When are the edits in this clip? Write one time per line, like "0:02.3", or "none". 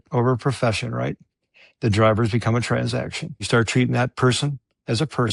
0:03.4